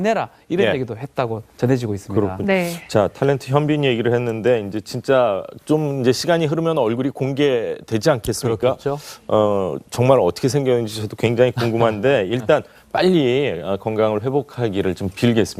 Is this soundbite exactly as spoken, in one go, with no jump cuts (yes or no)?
yes